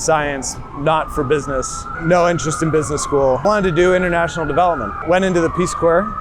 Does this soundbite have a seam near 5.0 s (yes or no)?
yes